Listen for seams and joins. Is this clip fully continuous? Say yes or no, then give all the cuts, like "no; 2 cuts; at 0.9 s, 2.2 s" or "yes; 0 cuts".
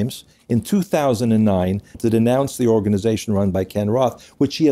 no; 1 cut; at 2.0 s